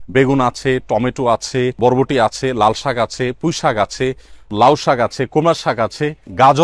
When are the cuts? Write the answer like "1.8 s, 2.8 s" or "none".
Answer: 1.8 s, 4.5 s